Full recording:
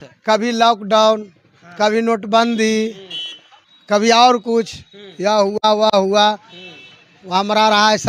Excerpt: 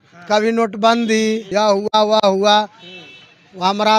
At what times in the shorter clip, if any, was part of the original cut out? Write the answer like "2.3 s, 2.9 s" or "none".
1.5 s